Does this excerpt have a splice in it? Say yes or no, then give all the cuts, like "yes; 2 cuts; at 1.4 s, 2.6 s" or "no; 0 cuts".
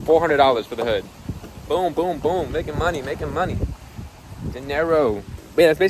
no; 0 cuts